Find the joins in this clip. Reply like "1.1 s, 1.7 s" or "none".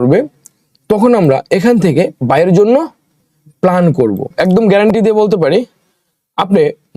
4.3 s